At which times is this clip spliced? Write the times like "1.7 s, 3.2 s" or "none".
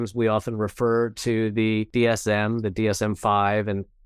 1.9 s